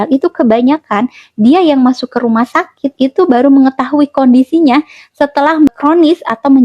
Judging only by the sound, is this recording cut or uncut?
cut